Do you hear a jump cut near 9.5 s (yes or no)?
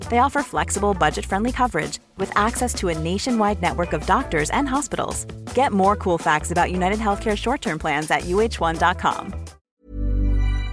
yes